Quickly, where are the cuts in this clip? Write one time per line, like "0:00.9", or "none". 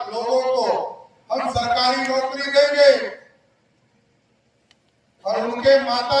none